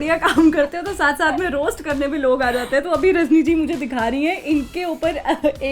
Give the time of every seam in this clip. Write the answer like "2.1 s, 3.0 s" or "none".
none